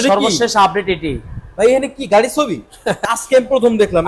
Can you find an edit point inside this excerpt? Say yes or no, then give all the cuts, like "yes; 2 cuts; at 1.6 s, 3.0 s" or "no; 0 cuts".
yes; 1 cut; at 3.0 s